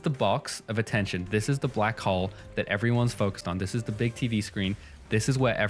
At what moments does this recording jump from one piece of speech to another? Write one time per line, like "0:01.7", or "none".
none